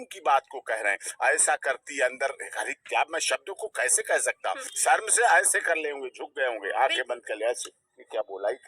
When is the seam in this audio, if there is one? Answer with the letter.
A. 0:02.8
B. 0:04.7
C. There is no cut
B